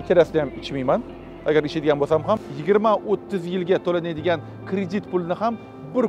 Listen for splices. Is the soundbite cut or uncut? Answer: cut